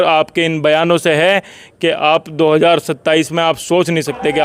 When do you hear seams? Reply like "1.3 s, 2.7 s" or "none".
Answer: none